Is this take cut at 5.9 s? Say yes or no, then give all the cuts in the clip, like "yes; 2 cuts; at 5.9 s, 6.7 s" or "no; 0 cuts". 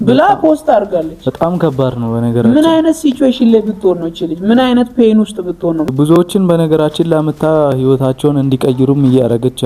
yes; 1 cut; at 5.9 s